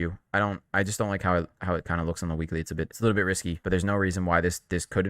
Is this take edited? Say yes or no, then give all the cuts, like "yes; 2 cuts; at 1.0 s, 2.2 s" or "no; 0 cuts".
yes; 2 cuts; at 2.9 s, 3.5 s